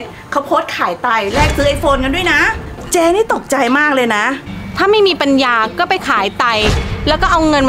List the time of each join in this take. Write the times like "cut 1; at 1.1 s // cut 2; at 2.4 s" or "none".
cut 1; at 4.4 s